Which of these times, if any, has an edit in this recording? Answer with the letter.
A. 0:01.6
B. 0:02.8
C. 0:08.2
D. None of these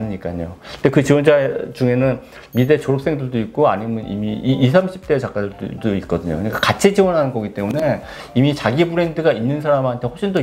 D